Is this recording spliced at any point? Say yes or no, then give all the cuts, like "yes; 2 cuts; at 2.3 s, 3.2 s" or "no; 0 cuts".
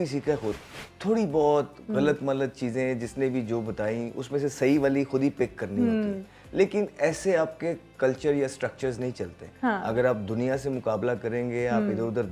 no; 0 cuts